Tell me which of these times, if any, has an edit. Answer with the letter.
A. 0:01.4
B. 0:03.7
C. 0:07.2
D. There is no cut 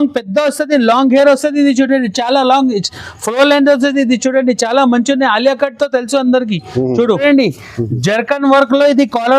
C